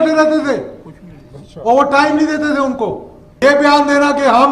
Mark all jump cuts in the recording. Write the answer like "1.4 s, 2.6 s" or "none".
3.4 s

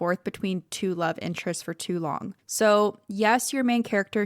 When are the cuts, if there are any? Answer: 2.4 s

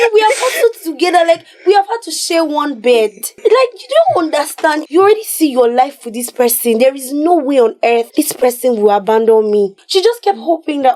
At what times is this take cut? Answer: 3.2 s, 4.8 s, 8.1 s, 9.8 s

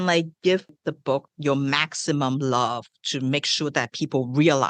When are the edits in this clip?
1.1 s

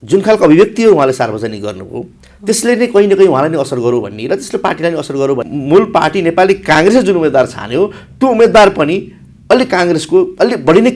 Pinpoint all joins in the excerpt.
5.5 s

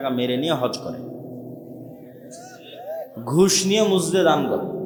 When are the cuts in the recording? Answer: none

